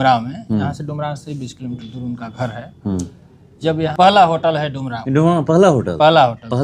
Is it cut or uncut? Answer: cut